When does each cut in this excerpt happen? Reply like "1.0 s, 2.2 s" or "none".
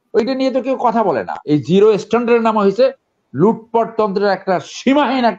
1.4 s

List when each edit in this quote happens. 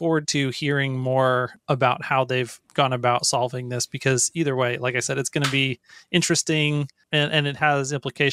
1.5 s, 7.0 s

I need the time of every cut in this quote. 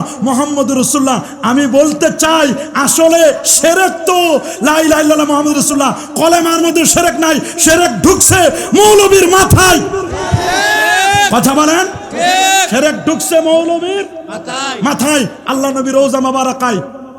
15.4 s

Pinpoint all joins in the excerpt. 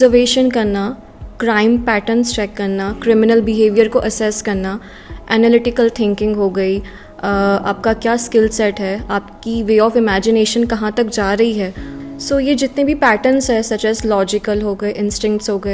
none

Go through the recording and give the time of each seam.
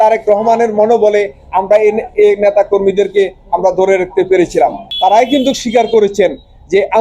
4.8 s

